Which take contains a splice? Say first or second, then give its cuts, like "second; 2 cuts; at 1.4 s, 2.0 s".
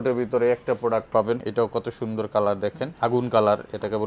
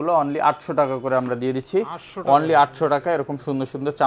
first; 2 cuts; at 1.5 s, 2.9 s